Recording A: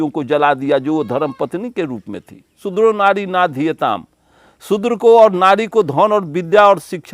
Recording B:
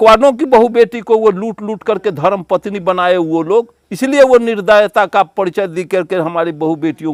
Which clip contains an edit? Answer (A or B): A